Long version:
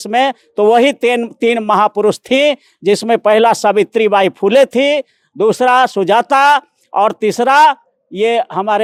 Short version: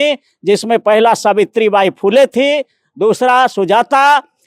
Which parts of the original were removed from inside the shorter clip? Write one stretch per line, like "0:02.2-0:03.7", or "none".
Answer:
none